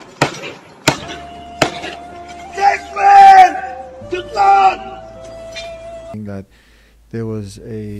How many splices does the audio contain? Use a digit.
1